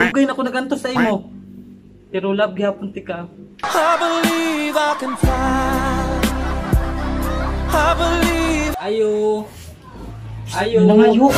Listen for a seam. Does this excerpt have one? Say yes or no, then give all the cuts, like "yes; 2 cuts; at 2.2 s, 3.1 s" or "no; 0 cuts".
yes; 1 cut; at 8.8 s